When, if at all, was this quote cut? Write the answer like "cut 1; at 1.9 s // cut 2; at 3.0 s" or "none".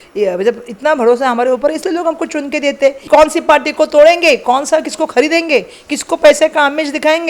cut 1; at 3.0 s